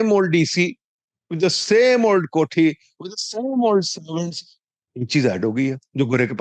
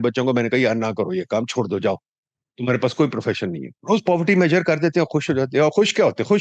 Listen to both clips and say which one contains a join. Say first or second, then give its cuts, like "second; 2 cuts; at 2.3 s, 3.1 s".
second; 1 cut; at 3.7 s